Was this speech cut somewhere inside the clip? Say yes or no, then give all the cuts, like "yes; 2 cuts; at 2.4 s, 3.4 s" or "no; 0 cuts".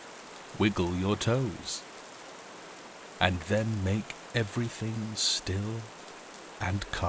no; 0 cuts